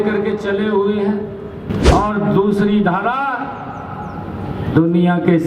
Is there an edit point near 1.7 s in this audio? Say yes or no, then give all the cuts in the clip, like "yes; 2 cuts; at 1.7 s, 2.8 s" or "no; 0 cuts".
yes; 1 cut; at 1.7 s